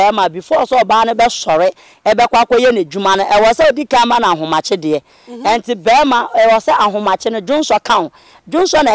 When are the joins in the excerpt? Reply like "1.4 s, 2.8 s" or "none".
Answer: none